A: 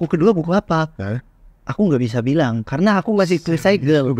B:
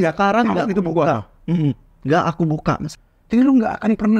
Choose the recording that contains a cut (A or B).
B